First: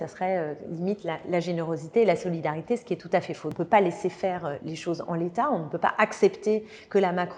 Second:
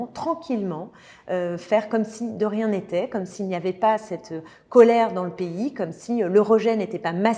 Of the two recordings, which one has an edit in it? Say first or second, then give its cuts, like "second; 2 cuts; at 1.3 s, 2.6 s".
first; 1 cut; at 3.5 s